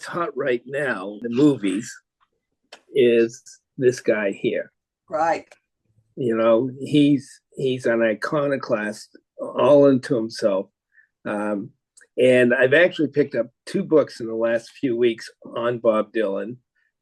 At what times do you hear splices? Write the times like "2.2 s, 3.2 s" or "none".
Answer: 1.2 s